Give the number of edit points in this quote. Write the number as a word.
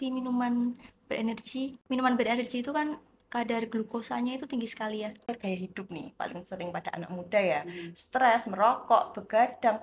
two